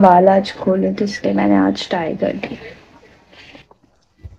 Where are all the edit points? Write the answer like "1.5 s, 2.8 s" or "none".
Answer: none